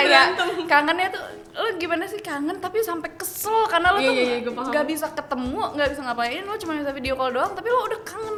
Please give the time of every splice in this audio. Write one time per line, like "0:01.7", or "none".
none